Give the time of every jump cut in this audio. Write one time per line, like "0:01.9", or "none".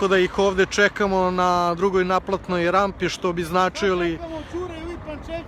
none